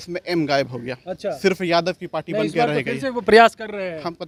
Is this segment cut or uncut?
uncut